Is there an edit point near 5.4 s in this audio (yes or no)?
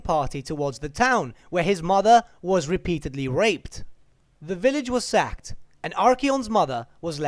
no